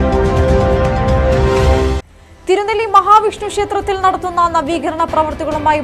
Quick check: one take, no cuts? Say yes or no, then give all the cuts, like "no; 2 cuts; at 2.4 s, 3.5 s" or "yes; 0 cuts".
no; 1 cut; at 2.1 s